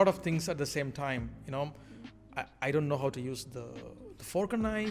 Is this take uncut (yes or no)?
yes